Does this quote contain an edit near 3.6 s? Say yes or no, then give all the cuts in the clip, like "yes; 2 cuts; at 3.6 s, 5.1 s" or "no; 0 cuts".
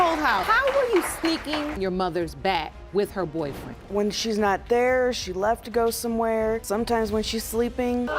yes; 2 cuts; at 1.8 s, 3.6 s